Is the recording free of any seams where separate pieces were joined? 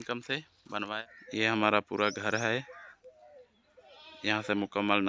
no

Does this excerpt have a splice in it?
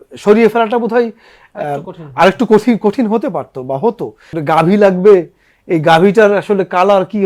yes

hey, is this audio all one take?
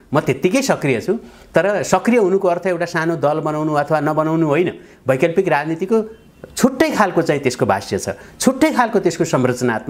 yes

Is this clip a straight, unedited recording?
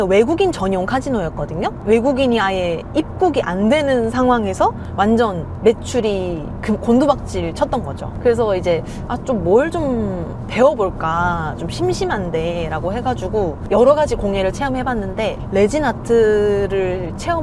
no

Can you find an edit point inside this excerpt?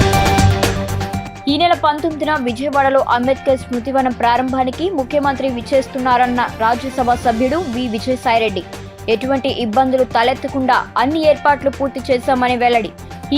yes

